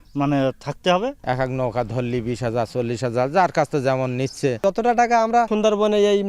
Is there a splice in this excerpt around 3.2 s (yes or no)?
no